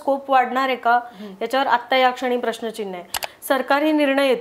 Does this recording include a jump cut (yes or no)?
yes